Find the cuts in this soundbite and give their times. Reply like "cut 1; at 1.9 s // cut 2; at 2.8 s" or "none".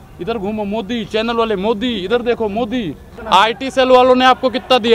cut 1; at 3.1 s